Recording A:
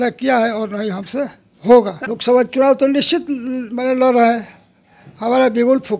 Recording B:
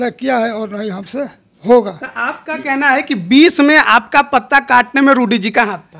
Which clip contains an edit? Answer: A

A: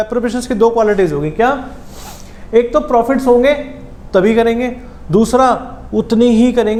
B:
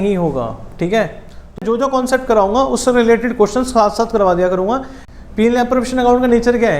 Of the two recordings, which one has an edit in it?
B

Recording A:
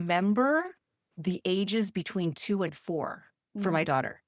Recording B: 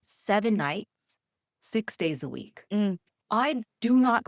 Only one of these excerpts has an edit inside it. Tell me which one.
B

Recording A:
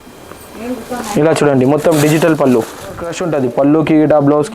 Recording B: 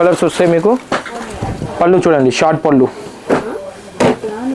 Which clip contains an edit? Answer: A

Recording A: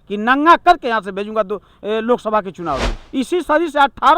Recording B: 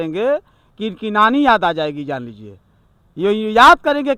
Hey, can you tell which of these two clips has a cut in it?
A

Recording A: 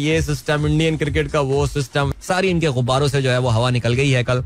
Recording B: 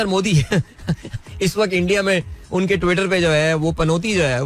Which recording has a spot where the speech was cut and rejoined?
A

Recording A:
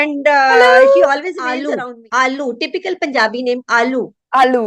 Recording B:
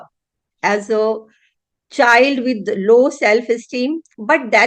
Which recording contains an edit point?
A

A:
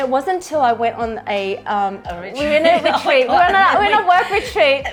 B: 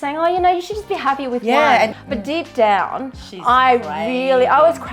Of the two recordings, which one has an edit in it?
B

